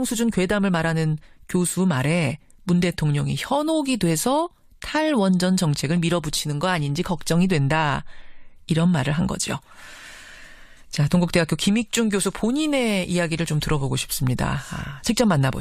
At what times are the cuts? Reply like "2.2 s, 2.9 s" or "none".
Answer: 2.5 s